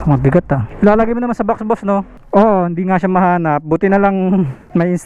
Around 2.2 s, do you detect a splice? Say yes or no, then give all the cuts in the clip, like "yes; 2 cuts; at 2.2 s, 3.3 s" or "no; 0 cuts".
yes; 1 cut; at 2.2 s